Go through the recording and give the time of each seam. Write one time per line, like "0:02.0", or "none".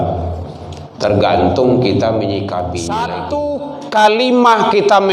0:03.2